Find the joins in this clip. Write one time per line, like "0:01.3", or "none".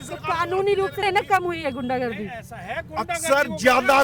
0:01.0

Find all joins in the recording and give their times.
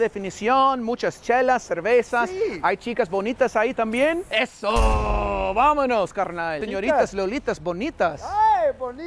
0:06.6

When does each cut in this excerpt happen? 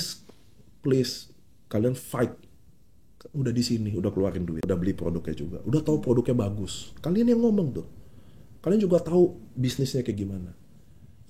0:04.6

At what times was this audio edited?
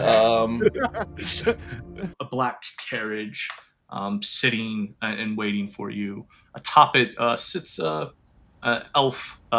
0:02.1

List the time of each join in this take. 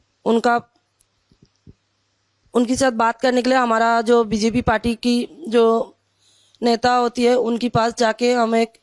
none

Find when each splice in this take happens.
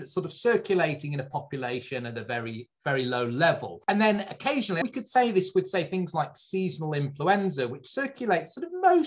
0:03.7
0:04.8

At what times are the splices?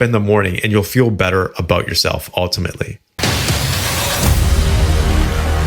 0:03.0

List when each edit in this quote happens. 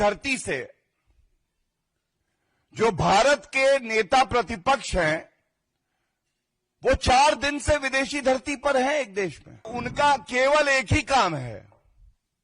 0:09.8

